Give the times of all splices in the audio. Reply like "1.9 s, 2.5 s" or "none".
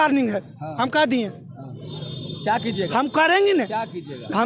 none